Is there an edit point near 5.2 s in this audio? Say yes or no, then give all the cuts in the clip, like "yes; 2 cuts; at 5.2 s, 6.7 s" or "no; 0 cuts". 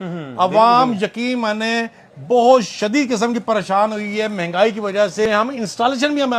yes; 1 cut; at 5.2 s